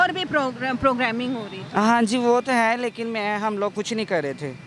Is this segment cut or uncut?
uncut